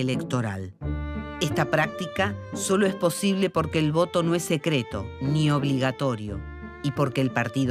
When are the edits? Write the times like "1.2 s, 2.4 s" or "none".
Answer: 1.3 s

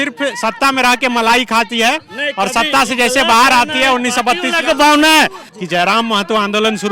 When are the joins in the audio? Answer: 5.5 s

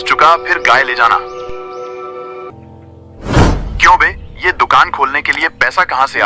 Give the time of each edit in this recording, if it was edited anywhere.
2.5 s

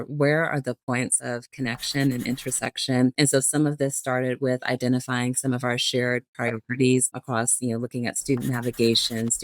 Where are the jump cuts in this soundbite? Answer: 3.1 s, 7.2 s

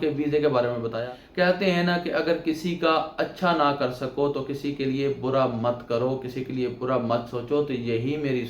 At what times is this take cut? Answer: 1.0 s

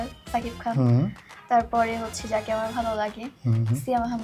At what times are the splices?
none

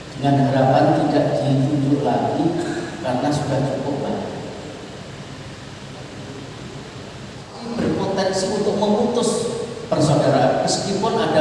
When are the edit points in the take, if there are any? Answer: 7.6 s

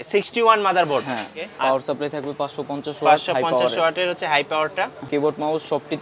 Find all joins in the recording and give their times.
1.4 s, 5.1 s

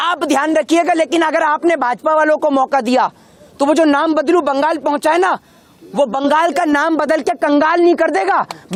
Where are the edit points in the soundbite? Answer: none

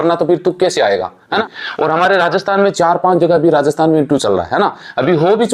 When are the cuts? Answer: 1.6 s

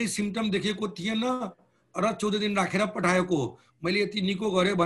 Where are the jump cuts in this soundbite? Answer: none

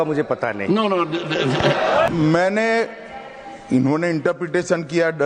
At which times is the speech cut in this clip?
2.1 s

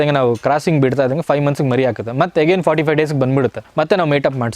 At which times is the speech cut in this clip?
3.6 s

